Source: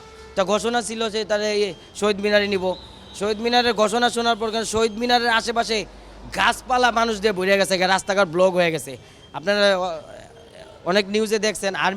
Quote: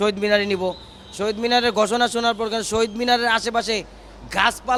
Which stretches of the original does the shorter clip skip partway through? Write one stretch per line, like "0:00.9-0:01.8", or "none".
none